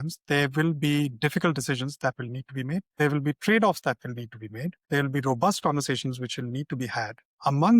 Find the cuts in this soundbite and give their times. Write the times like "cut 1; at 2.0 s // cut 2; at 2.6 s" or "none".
cut 1; at 2.9 s